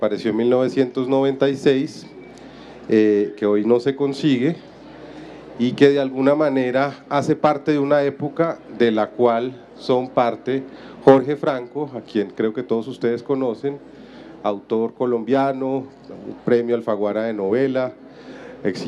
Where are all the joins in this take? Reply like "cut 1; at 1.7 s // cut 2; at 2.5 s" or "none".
cut 1; at 7.4 s